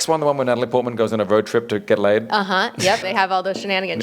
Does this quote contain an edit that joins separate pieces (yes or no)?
yes